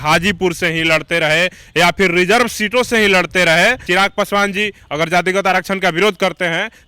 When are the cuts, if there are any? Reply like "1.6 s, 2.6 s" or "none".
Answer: 3.8 s